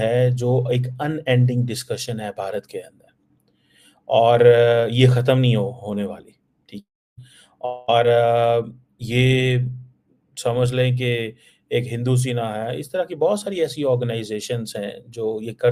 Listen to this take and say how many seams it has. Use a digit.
0